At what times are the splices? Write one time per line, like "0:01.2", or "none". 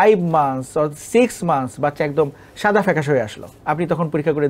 0:03.4